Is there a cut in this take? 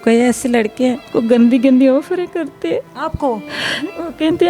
yes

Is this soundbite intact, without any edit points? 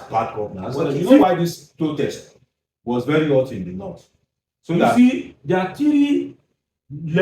no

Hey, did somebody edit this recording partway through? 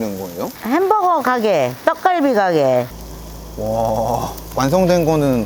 no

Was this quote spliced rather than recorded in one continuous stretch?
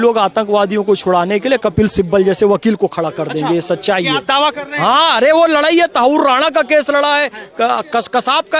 no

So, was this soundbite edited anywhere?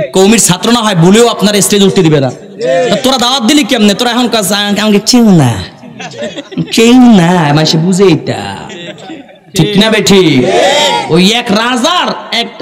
no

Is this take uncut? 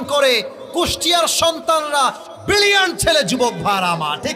yes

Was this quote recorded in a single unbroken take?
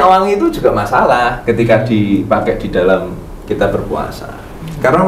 yes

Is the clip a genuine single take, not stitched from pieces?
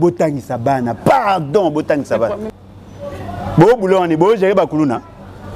no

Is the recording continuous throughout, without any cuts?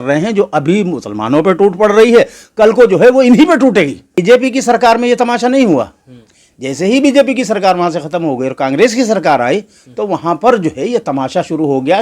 no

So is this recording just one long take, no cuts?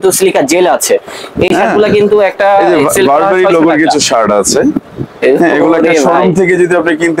yes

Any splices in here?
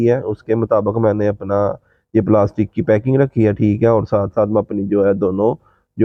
no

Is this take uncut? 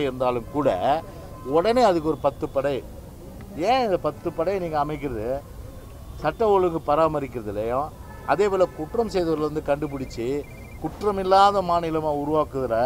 yes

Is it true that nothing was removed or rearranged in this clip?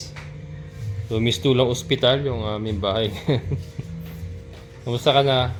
yes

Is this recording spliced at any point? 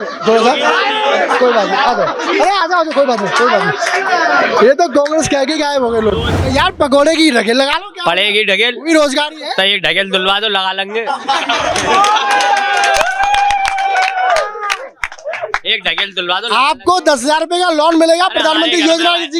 yes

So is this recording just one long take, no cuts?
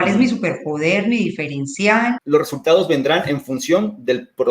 no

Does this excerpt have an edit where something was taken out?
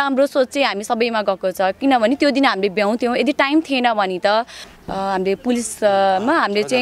yes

